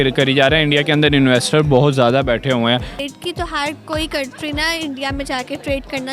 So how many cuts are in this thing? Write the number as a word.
one